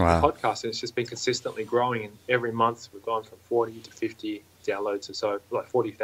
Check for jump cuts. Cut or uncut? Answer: uncut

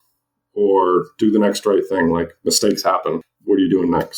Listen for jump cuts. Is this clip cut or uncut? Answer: cut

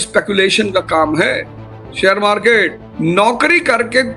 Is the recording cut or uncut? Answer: cut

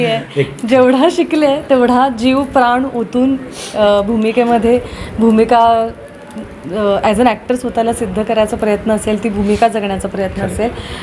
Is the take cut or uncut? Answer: uncut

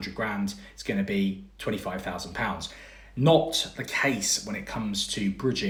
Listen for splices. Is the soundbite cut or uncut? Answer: uncut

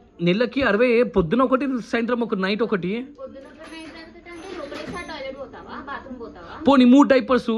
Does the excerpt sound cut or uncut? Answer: uncut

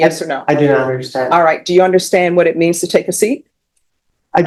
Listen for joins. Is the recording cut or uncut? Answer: uncut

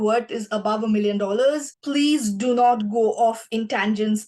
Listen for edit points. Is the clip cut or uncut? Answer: cut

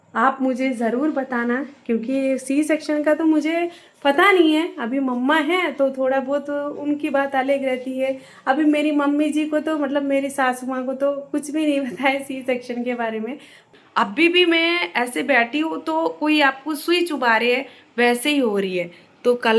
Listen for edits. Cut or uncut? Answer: cut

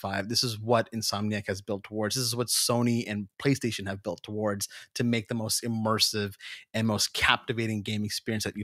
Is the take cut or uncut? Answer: uncut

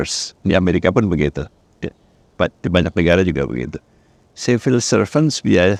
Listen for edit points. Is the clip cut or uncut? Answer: uncut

